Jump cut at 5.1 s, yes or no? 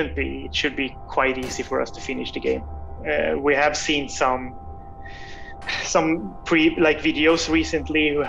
no